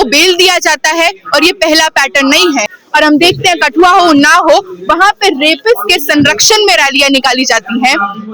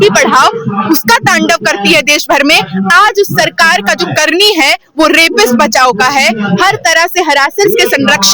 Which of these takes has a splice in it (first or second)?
first